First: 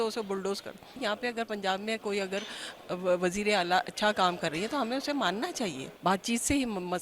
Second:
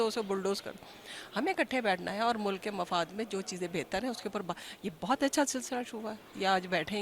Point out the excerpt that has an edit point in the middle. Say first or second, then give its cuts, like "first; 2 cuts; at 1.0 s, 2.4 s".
first; 2 cuts; at 1.0 s, 5.9 s